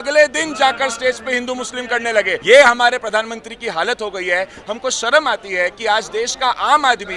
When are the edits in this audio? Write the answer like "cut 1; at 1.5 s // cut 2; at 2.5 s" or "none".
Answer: cut 1; at 2.4 s